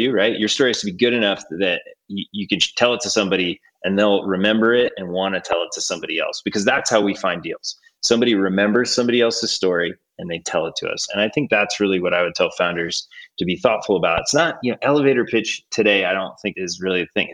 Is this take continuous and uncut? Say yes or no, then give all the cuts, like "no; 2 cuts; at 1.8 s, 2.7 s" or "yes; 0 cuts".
yes; 0 cuts